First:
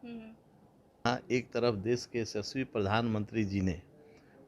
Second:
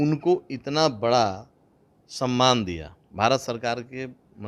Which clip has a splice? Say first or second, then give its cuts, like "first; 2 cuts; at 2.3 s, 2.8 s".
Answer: first; 1 cut; at 0.9 s